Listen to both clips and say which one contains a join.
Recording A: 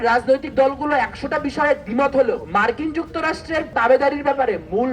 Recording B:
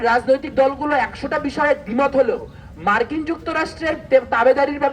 A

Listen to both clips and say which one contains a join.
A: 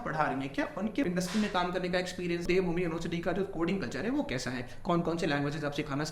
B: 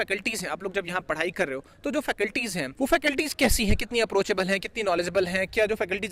A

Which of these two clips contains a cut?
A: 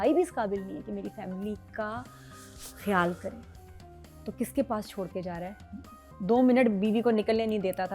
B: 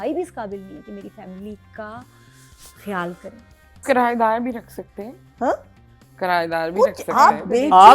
B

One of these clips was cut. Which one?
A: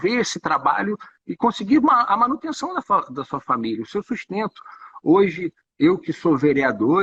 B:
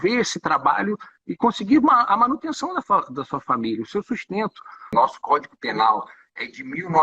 B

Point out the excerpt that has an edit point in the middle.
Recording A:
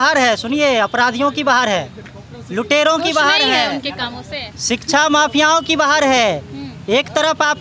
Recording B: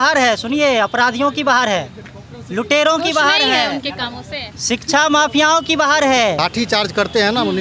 B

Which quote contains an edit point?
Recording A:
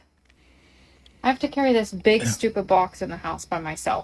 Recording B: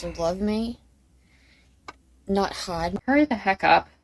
B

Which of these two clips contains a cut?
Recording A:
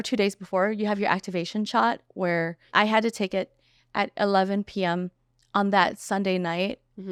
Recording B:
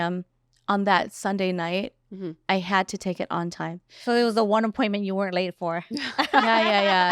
B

